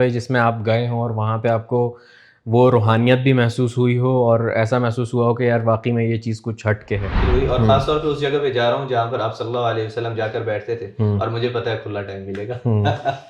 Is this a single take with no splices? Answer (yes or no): no